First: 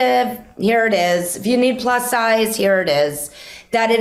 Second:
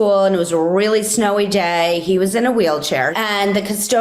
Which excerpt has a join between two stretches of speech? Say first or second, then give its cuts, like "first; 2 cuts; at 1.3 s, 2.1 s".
second; 1 cut; at 3.1 s